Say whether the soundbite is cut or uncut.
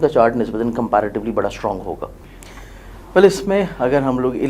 cut